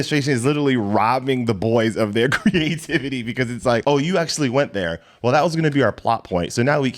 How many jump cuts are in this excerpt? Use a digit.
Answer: 1